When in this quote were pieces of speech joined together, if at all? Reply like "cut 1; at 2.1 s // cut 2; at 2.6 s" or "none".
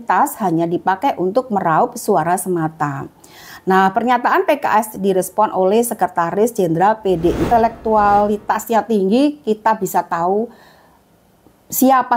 cut 1; at 7.4 s